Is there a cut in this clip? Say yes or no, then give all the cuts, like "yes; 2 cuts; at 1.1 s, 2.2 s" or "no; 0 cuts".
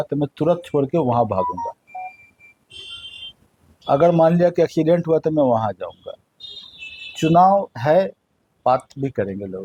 no; 0 cuts